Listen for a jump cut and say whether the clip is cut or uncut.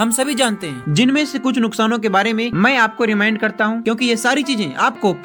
uncut